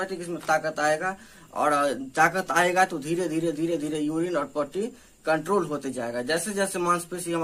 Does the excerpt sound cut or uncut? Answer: uncut